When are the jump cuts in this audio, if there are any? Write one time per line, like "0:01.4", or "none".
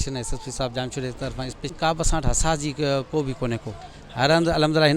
0:01.8